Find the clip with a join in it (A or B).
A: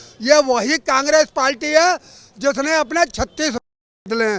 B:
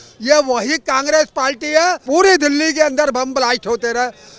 B